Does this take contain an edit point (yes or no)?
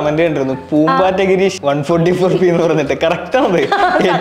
yes